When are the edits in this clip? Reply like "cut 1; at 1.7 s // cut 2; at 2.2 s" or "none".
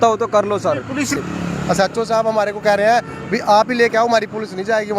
cut 1; at 1.1 s